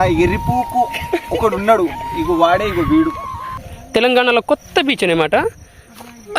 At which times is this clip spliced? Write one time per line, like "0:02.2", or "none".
0:03.6